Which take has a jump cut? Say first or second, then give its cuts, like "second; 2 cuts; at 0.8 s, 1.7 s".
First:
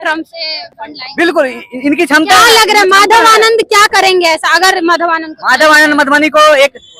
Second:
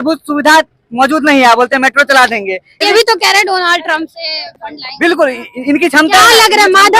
second; 1 cut; at 2.8 s